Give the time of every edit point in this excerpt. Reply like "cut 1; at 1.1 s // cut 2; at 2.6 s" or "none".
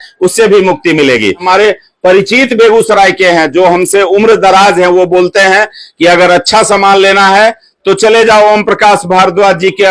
cut 1; at 1.4 s